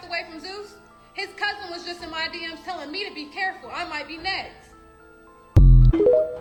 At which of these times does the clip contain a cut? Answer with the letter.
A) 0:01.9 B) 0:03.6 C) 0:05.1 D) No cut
D